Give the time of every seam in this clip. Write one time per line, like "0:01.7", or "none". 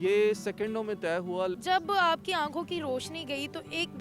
0:01.6